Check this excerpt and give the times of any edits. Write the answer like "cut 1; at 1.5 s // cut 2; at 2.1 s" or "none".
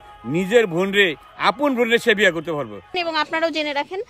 cut 1; at 3.0 s